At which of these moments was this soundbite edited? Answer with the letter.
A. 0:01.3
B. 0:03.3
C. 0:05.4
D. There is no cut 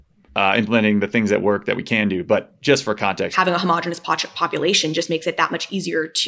B